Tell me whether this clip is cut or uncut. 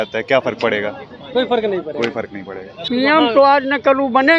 cut